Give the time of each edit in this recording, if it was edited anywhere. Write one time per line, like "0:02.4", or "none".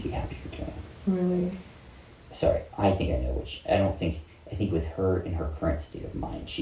none